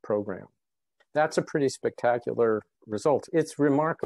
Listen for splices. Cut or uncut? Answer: cut